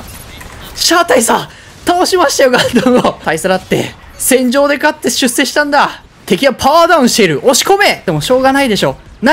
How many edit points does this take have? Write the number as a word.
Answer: three